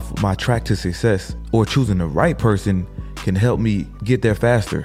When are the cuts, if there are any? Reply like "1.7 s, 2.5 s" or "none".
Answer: 1.3 s, 3.9 s